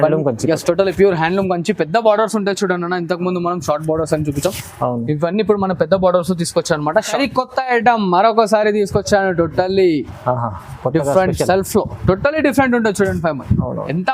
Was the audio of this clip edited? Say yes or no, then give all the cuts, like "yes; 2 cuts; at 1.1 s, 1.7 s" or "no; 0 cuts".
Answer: yes; 1 cut; at 7.1 s